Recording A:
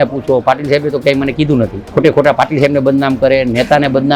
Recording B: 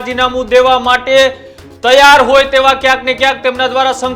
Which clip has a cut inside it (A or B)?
A